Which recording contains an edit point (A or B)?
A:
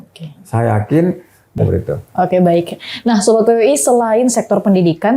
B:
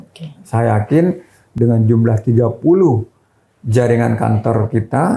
A